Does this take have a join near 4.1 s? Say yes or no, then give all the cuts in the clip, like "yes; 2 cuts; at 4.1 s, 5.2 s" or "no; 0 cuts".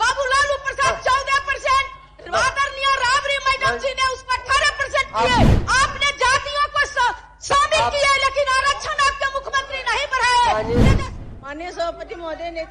no; 1 cut; at 10.9 s